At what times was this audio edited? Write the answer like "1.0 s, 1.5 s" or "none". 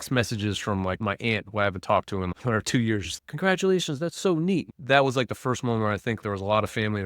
1.0 s, 2.3 s, 3.2 s, 4.7 s, 6.2 s